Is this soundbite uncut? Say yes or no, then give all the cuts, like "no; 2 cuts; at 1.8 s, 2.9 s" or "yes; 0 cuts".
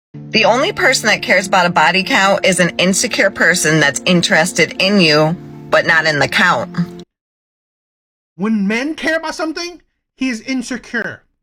yes; 0 cuts